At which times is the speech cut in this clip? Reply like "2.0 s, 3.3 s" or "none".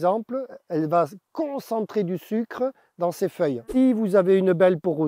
3.6 s